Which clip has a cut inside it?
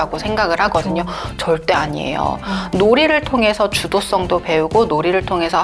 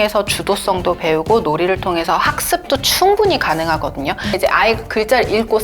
second; 1 cut; at 4.3 s

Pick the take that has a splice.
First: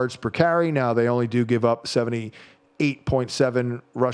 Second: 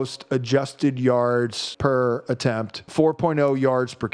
second; 2 cuts; at 1.6 s, 2.8 s

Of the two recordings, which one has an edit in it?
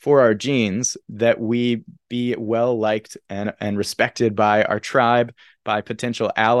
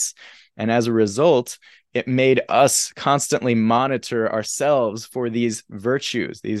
first; 1 cut; at 1.0 s

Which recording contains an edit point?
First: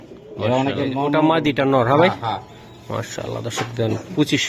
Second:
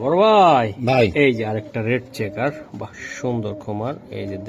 first; 1 cut; at 1.1 s

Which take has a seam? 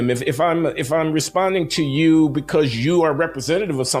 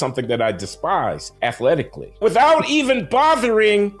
second; 2 cuts; at 1.3 s, 2.2 s

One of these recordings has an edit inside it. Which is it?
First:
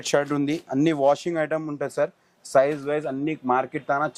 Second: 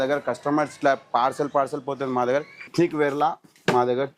second; 1 cut; at 2.7 s

